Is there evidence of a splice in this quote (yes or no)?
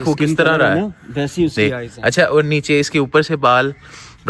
no